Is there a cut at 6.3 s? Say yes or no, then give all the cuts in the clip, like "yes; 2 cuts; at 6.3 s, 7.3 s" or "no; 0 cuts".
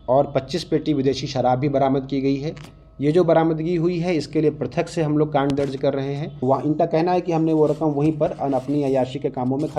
yes; 1 cut; at 6.3 s